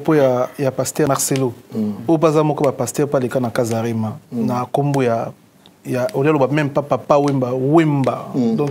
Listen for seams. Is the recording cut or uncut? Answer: uncut